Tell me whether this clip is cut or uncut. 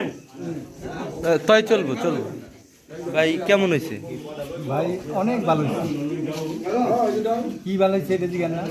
cut